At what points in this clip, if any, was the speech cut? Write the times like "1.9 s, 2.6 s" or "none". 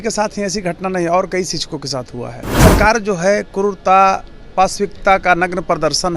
2.4 s